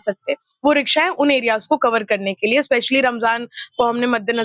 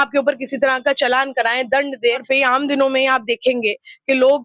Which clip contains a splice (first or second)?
second